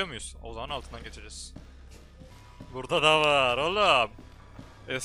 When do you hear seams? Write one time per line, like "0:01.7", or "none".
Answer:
0:02.3